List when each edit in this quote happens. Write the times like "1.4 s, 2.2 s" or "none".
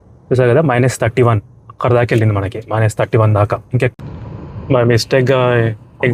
3.9 s

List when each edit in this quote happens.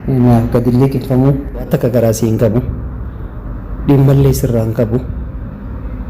1.7 s

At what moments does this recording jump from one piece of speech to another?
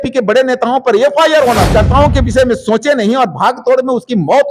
1.7 s

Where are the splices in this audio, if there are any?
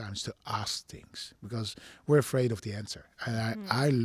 none

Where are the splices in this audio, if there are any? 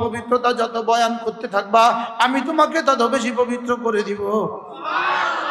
none

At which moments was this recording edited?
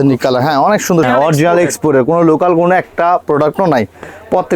1.1 s

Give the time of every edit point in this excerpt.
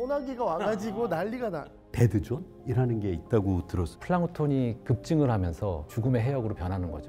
1.9 s, 3.9 s, 5.9 s

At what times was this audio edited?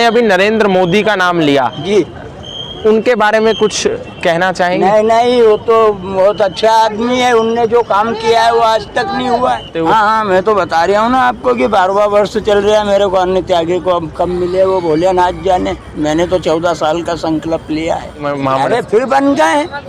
9.7 s, 18.2 s

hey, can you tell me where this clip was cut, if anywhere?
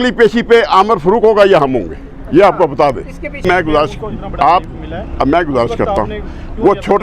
3.4 s

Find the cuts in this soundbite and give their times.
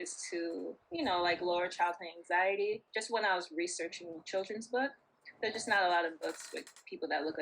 2.9 s

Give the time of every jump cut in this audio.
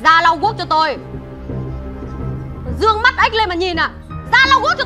2.5 s

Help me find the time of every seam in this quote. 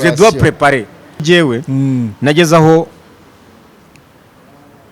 1.2 s

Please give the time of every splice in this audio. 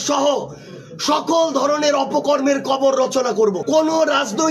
3.6 s

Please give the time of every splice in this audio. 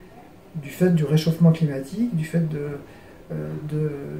none

